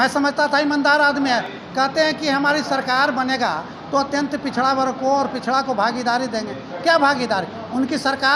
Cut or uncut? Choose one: uncut